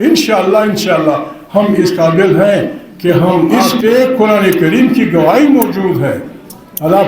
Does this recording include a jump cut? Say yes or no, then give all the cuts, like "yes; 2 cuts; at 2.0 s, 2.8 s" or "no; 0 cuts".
yes; 1 cut; at 3.6 s